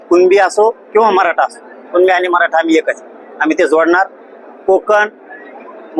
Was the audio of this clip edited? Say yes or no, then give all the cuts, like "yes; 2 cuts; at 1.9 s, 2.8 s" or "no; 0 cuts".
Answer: no; 0 cuts